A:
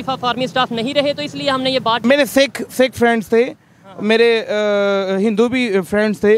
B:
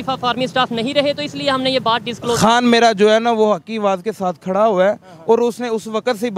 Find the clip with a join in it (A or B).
A